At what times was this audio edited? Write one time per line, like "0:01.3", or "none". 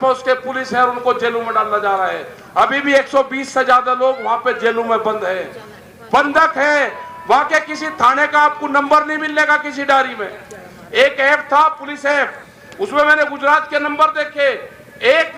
none